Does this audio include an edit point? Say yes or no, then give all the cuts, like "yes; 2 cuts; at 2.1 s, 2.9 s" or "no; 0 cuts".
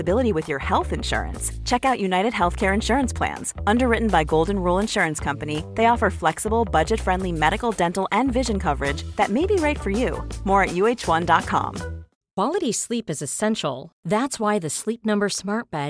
yes; 1 cut; at 12.0 s